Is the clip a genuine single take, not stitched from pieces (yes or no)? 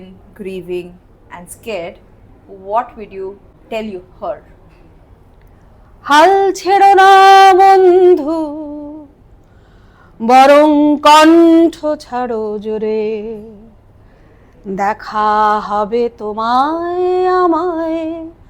no